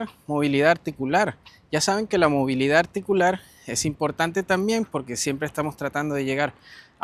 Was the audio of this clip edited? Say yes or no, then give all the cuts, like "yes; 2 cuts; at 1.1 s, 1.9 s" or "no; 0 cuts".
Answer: no; 0 cuts